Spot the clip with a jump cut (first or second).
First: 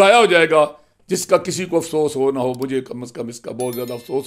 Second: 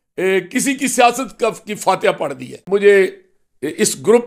second